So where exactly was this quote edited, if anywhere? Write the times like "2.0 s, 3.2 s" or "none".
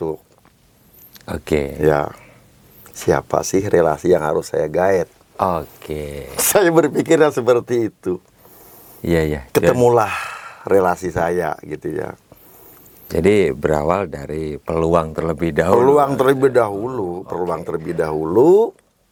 none